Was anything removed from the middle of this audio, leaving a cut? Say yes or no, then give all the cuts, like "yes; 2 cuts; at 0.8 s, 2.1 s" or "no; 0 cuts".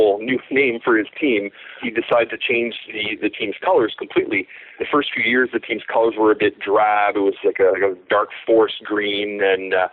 yes; 2 cuts; at 1.7 s, 4.8 s